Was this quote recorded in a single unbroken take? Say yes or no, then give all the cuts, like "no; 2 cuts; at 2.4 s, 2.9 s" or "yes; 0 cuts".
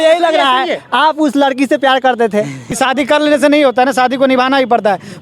yes; 0 cuts